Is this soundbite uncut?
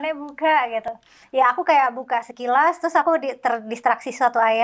yes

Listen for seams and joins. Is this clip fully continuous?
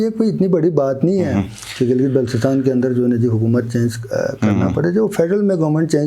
yes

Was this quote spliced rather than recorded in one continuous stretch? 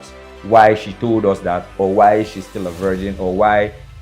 no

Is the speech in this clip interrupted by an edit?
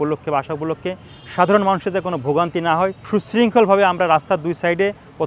yes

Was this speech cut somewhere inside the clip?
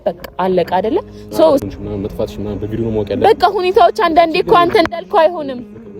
yes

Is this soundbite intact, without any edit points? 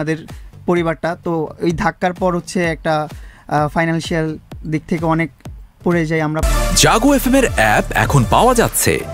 no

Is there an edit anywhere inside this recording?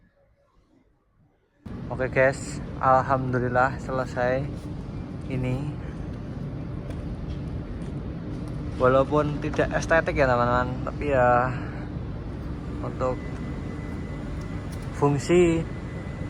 yes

